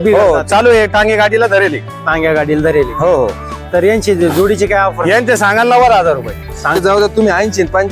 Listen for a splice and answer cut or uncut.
cut